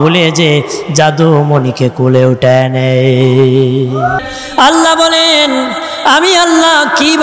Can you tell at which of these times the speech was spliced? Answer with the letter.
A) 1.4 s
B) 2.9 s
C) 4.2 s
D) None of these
C